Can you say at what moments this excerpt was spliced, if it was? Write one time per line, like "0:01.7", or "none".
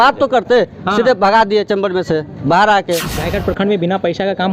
0:03.1